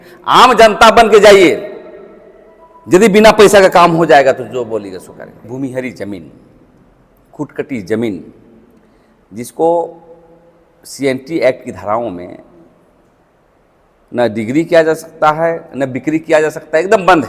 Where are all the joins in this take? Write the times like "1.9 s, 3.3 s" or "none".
5.5 s